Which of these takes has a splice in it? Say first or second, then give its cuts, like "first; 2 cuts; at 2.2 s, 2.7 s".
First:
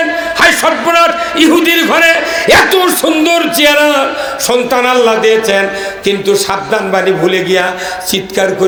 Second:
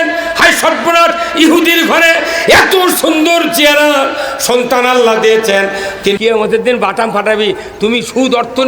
second; 1 cut; at 6.2 s